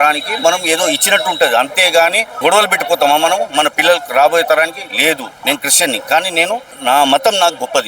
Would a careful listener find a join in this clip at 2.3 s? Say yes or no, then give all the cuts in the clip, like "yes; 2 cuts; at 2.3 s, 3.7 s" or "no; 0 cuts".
yes; 3 cuts; at 2.3 s, 5.4 s, 6.7 s